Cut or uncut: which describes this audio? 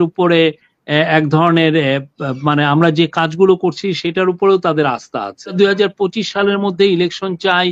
cut